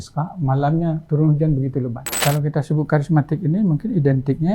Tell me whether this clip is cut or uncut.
cut